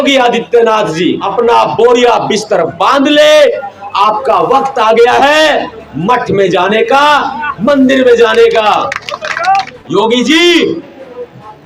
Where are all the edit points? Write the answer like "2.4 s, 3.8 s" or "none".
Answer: 1.2 s, 9.8 s